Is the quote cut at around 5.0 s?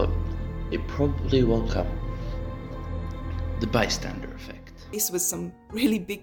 yes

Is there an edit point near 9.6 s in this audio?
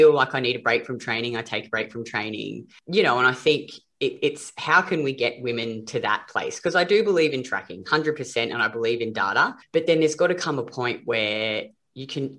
yes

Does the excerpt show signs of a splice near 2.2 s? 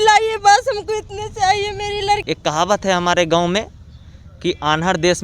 yes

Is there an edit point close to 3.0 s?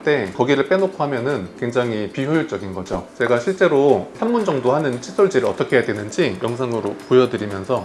yes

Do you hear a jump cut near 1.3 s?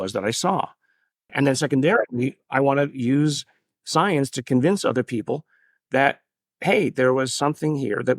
yes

